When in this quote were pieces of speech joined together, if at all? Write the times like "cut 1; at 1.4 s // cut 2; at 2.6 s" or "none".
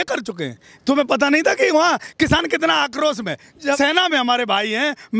cut 1; at 3.8 s